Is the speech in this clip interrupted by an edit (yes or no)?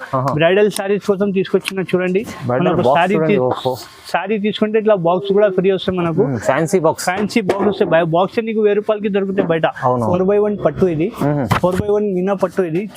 yes